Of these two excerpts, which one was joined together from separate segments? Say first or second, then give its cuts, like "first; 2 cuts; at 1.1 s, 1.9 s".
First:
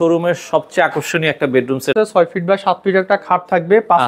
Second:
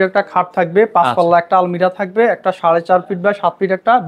first; 1 cut; at 1.9 s